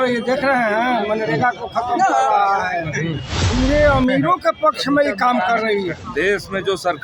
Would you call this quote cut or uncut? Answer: cut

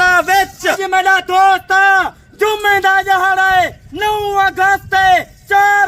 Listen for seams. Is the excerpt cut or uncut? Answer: cut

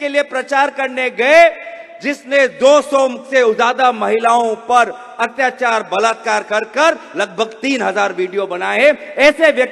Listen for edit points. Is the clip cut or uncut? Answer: uncut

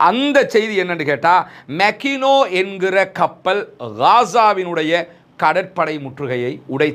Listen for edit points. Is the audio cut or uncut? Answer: uncut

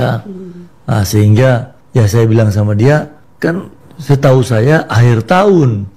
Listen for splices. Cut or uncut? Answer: uncut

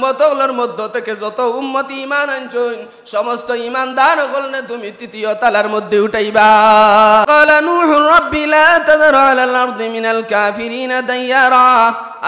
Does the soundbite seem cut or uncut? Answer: cut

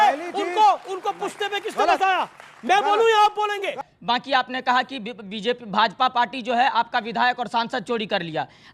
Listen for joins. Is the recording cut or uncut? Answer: cut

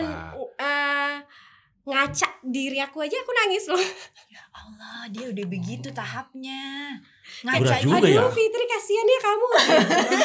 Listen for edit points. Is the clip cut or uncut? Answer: uncut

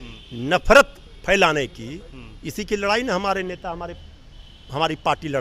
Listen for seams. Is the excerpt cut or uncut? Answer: uncut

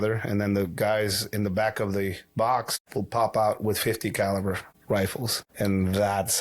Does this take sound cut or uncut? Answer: cut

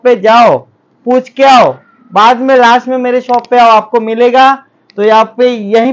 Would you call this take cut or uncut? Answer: uncut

